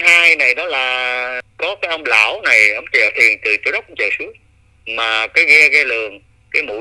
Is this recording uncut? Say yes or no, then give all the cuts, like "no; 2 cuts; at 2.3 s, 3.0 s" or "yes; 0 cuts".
no; 1 cut; at 1.5 s